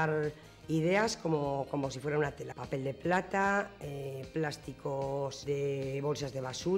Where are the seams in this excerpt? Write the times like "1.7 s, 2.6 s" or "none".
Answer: 2.5 s, 5.4 s